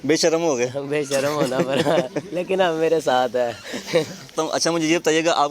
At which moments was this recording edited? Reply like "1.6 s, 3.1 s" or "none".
4.3 s